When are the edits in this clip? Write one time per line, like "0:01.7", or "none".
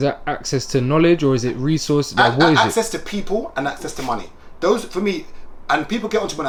none